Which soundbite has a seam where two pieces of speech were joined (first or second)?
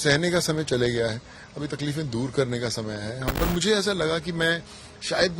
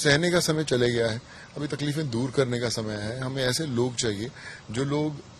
first